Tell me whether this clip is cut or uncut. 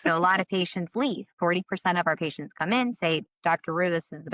cut